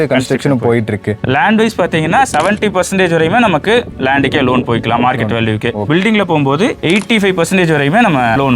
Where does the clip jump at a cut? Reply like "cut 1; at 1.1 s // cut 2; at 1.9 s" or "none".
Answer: cut 1; at 1.2 s // cut 2; at 5.9 s